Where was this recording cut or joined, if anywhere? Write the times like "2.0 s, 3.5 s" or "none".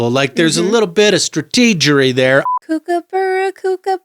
2.5 s

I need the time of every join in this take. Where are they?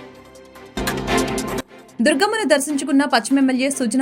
0.8 s, 1.7 s

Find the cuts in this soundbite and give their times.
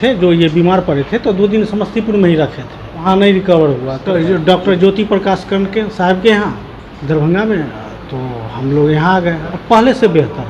3.0 s, 4.1 s, 9.5 s

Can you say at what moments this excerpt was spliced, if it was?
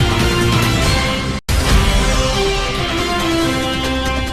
1.0 s, 2.7 s

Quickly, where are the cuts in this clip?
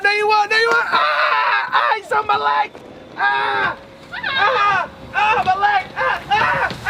none

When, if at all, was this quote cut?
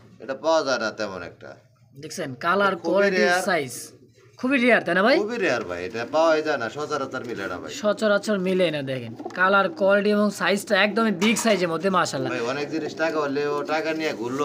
none

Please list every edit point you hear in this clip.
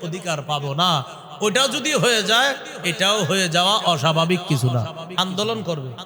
5.1 s

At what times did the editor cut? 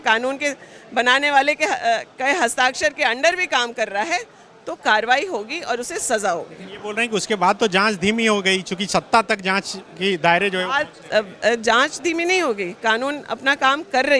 none

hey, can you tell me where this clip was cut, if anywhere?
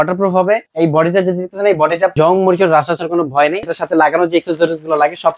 2.1 s, 3.7 s

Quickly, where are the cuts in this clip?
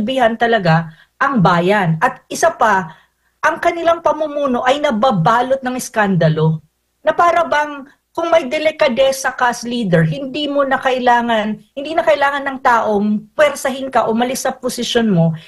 none

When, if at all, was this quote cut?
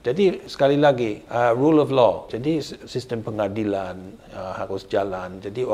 1.2 s, 2.3 s

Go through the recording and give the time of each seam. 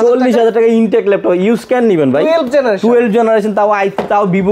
none

